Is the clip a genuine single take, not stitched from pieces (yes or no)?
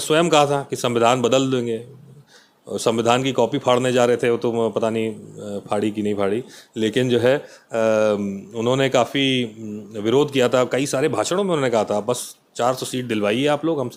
yes